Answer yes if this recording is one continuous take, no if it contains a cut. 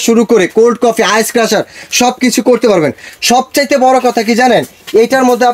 yes